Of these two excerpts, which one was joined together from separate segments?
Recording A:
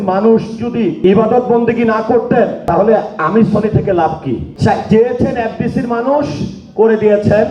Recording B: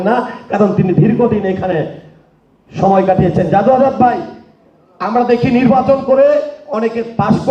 A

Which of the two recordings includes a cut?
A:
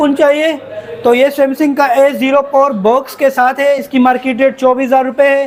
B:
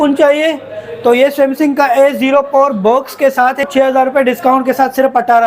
B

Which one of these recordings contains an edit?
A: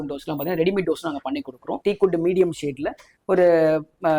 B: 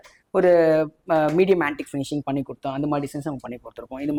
A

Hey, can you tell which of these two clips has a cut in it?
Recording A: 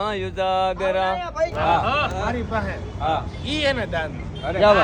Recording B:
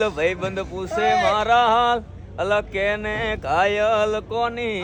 A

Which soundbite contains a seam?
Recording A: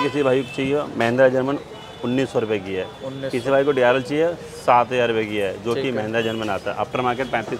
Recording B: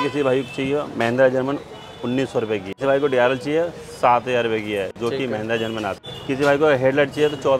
B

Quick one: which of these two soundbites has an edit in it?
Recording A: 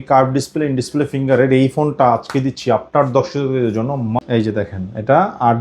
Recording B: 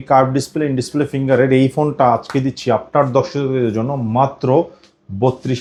A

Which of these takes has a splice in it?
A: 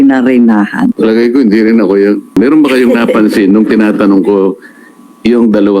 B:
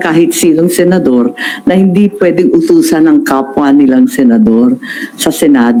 A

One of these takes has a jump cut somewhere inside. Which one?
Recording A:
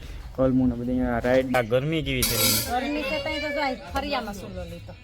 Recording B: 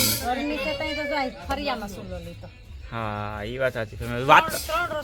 A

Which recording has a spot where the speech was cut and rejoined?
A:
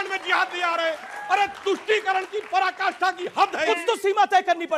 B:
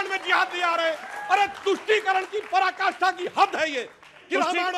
A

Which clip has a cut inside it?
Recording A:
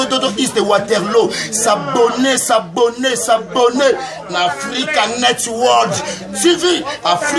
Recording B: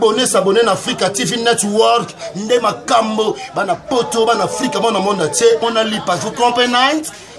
B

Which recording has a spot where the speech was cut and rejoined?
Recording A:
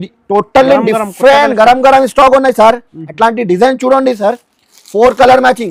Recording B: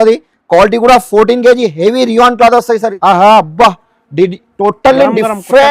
B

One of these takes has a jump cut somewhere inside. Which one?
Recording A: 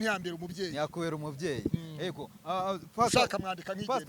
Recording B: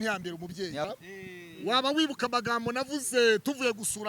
B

